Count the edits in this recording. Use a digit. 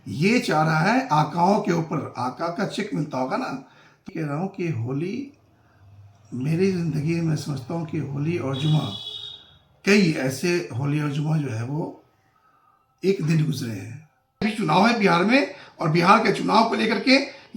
2